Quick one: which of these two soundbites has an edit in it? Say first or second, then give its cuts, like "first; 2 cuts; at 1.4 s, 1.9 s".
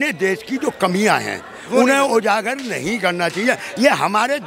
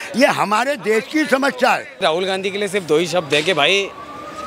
second; 1 cut; at 2.0 s